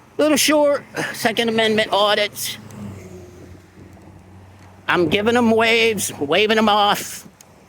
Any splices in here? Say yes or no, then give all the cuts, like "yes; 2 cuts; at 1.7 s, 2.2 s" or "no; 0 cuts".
yes; 1 cut; at 1.7 s